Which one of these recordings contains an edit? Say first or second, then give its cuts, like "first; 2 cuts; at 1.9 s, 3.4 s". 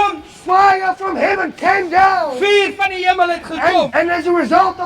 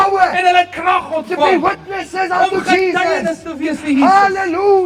first; 1 cut; at 3.9 s